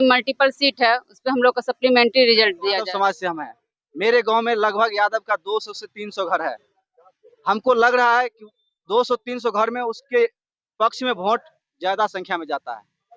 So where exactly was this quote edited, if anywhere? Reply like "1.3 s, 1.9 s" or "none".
2.8 s